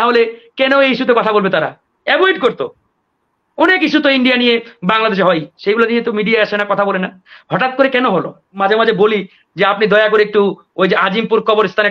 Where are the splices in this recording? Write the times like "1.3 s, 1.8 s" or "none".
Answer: 8.5 s